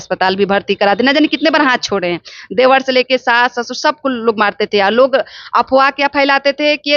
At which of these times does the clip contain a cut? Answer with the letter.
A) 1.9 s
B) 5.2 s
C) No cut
C